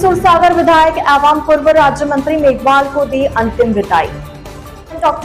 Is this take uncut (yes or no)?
yes